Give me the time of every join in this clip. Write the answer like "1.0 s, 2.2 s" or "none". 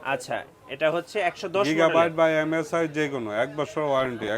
none

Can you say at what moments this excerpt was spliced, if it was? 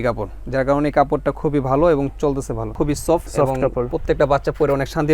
2.7 s

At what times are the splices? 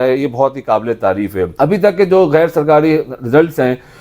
1.5 s

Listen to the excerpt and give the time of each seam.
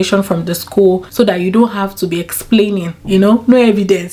none

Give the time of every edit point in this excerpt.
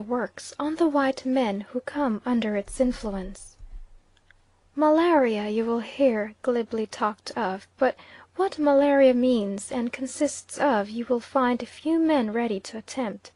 none

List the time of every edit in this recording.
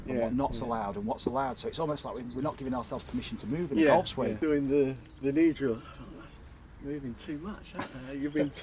4.4 s

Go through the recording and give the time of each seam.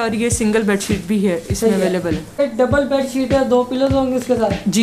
2.4 s

